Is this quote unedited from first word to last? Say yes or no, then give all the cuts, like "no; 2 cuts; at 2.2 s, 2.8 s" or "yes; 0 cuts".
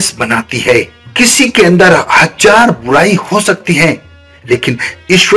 yes; 0 cuts